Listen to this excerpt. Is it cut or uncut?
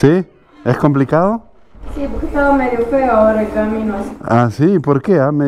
uncut